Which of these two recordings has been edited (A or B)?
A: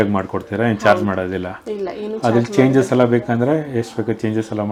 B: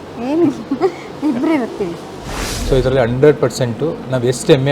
B